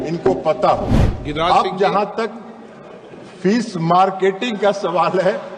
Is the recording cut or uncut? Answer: uncut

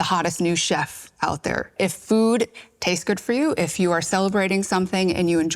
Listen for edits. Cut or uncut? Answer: cut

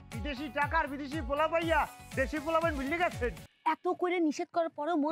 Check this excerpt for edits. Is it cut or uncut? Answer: cut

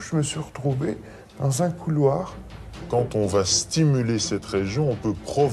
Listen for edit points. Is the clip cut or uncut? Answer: cut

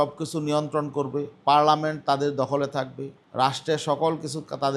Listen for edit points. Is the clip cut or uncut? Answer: uncut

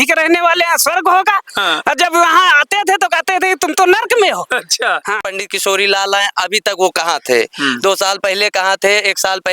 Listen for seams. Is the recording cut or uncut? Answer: cut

